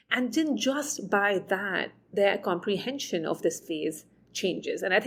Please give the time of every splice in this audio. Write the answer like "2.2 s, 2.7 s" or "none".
none